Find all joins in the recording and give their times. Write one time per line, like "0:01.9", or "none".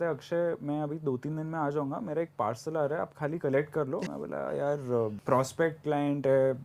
0:04.0
0:05.2